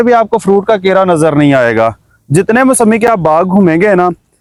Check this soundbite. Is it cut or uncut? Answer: uncut